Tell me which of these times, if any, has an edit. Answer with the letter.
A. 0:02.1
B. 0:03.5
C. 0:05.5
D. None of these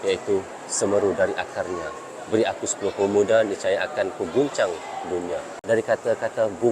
C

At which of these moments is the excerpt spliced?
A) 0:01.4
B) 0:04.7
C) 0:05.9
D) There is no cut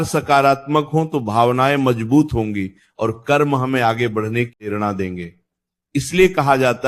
B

